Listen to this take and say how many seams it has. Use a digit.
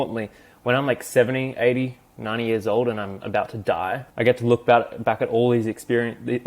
1